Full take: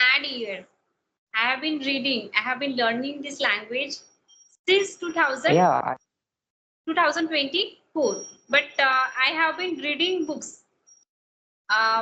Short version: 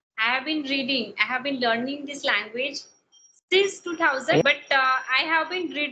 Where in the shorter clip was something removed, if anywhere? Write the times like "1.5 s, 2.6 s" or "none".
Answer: 4.4 s